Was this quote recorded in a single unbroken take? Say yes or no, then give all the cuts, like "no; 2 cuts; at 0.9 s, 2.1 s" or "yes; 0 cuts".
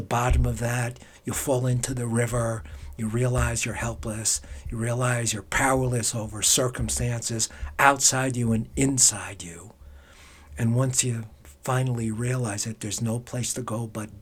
yes; 0 cuts